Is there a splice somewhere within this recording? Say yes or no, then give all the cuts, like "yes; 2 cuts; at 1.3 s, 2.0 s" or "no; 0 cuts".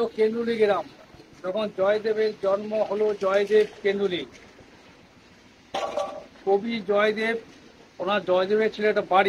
no; 0 cuts